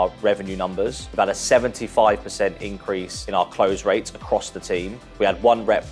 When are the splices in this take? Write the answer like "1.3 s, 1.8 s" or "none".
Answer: 1.0 s, 3.1 s, 5.0 s